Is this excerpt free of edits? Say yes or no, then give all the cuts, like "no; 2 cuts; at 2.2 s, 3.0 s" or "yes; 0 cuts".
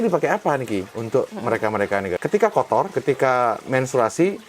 no; 3 cuts; at 0.9 s, 2.2 s, 2.9 s